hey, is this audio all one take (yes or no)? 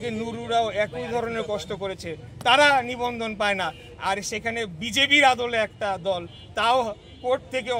yes